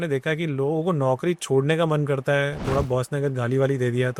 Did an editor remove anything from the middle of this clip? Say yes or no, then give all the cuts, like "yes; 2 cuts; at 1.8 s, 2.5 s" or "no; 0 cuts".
no; 0 cuts